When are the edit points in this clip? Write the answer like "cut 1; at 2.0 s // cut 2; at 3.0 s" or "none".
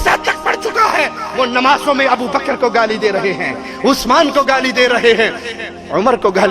none